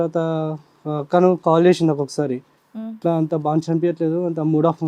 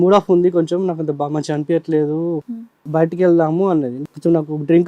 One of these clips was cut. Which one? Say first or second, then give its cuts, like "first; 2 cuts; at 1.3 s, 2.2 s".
second; 2 cuts; at 2.8 s, 4.0 s